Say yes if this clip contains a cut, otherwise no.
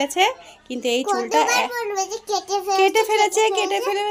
no